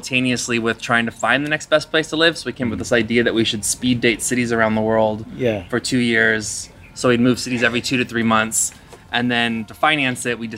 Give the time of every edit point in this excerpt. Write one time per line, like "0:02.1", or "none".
none